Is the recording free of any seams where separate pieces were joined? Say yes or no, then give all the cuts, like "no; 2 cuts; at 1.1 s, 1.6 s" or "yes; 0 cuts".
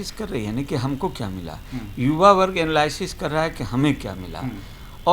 yes; 0 cuts